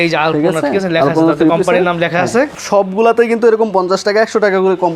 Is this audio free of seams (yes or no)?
no